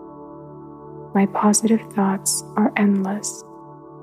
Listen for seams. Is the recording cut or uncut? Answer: cut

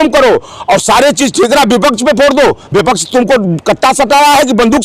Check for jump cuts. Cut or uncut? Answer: uncut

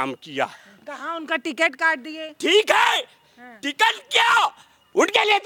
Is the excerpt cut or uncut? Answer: uncut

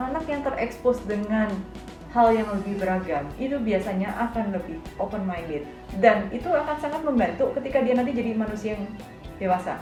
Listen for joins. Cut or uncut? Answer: uncut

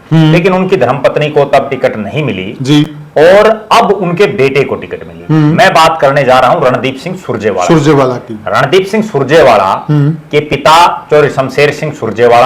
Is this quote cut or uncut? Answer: uncut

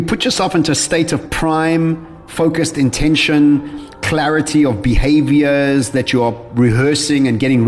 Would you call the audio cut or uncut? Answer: cut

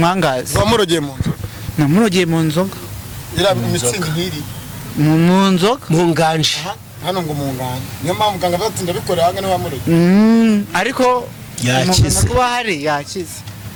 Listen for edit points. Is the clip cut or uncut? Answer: uncut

